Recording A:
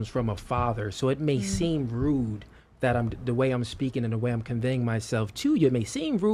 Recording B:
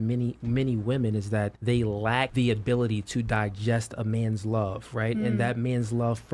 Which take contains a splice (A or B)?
B